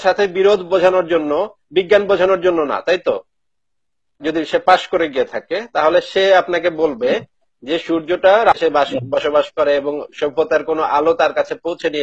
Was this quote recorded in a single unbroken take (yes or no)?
no